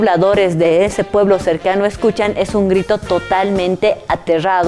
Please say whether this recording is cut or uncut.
uncut